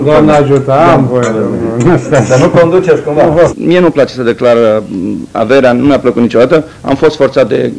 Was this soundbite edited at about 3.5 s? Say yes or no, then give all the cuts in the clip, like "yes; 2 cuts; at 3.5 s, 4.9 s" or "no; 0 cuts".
yes; 1 cut; at 3.5 s